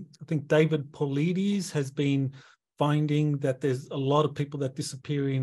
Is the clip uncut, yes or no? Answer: yes